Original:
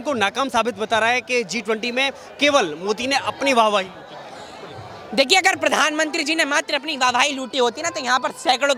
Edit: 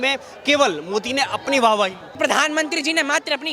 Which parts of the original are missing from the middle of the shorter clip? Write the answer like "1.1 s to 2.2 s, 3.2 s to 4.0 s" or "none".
4.1 s to 5.6 s